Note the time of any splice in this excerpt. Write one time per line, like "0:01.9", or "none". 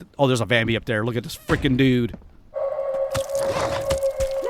0:02.6